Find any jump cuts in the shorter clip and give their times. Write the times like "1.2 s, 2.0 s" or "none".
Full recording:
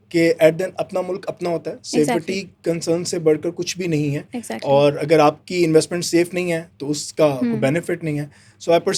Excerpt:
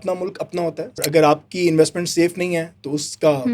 1.0 s